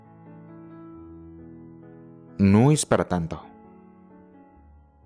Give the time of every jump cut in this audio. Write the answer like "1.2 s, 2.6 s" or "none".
2.2 s, 3.5 s